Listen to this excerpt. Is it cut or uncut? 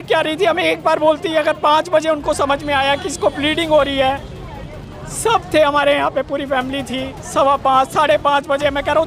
uncut